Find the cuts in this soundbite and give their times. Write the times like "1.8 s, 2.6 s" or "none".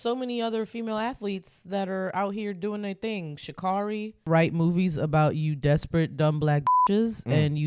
4.1 s